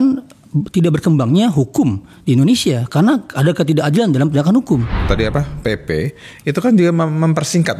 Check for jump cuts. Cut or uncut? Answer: cut